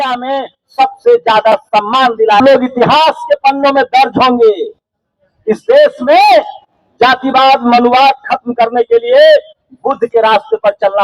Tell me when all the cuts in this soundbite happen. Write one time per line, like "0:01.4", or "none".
0:02.4

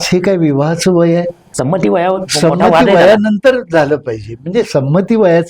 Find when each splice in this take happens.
0:01.4

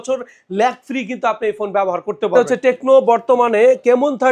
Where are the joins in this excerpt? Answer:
0:02.3

